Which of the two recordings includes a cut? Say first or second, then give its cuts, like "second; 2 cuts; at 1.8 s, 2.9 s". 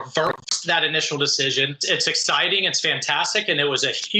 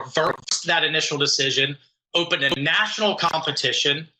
first; 1 cut; at 1.8 s